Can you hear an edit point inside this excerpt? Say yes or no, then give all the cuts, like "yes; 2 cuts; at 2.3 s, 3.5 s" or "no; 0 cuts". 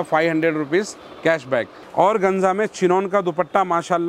yes; 1 cut; at 1.8 s